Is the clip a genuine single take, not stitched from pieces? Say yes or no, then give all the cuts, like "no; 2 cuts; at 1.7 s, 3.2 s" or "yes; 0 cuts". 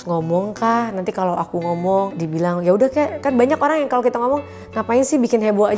yes; 0 cuts